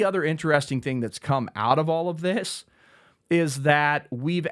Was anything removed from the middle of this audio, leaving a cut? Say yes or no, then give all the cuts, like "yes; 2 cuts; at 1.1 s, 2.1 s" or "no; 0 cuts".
no; 0 cuts